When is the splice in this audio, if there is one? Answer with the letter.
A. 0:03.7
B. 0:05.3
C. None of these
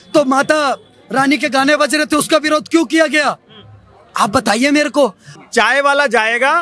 B